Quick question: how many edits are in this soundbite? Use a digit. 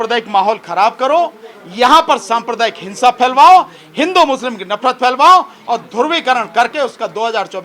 0